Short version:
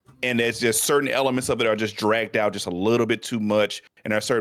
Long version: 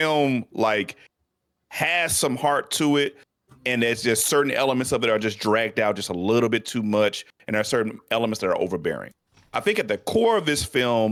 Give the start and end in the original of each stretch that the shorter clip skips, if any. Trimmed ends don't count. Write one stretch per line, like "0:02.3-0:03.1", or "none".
none

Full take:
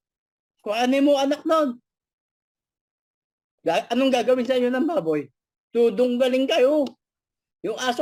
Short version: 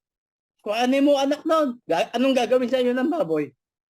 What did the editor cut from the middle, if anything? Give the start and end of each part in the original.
0:01.8-0:03.5

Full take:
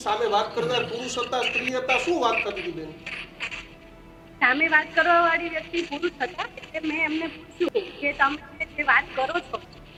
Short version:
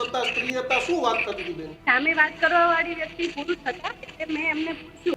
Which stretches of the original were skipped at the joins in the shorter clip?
0:02.9-0:04.2

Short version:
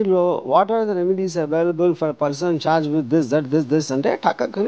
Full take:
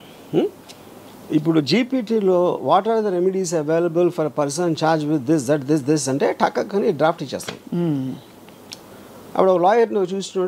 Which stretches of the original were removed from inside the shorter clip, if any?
none

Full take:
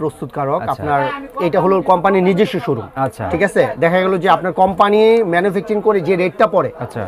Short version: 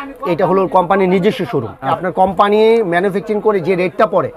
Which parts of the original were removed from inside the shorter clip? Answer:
0:03.1-0:04.4

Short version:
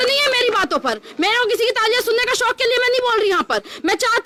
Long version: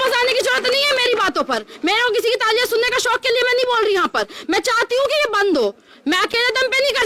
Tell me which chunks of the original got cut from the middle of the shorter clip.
none

